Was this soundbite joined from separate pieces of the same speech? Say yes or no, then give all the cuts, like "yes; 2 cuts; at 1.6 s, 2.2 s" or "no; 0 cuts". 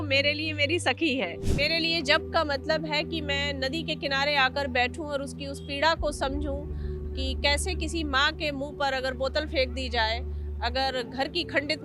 yes; 1 cut; at 1.4 s